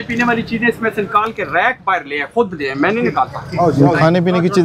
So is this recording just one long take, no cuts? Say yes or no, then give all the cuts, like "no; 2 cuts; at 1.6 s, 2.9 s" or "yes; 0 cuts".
yes; 0 cuts